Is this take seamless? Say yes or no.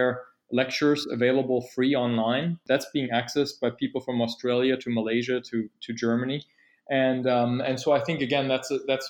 yes